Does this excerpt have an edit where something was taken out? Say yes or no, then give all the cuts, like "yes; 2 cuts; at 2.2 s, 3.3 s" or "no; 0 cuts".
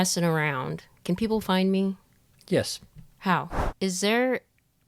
yes; 1 cut; at 3.6 s